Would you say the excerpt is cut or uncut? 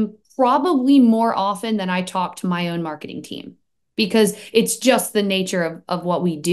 uncut